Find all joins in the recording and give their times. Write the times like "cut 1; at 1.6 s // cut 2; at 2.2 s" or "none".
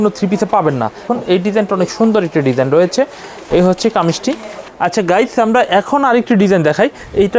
cut 1; at 1.1 s // cut 2; at 4.5 s